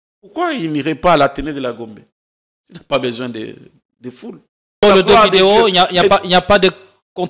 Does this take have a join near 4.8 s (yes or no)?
yes